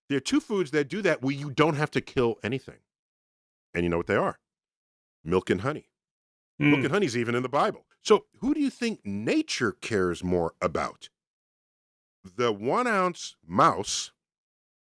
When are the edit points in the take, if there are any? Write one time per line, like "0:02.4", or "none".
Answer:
0:07.9

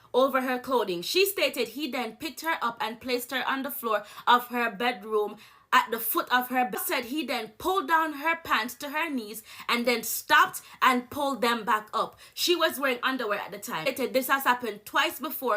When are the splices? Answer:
0:06.8
0:13.9

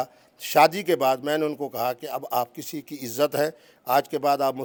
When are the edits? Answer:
none

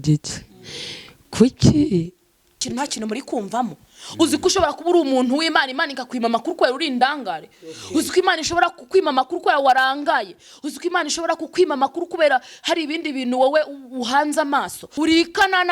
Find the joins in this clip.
0:02.5
0:14.8

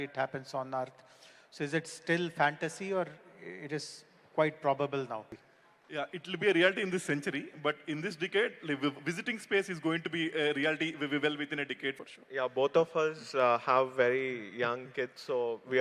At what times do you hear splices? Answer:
0:05.3
0:12.1

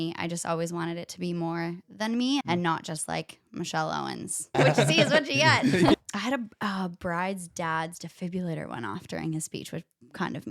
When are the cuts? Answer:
0:02.4
0:04.6
0:05.9

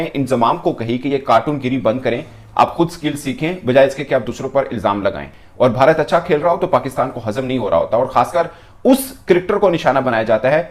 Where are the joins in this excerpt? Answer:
none

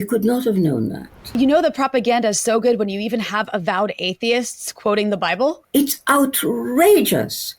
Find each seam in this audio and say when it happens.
0:01.3
0:05.6

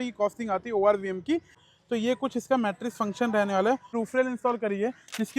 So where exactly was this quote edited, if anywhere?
0:01.7
0:03.9

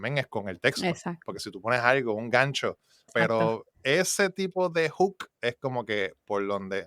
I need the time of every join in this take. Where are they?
0:03.1

